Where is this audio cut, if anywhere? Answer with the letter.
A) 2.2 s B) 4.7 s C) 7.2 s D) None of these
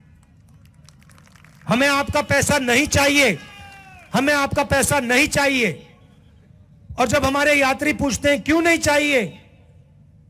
D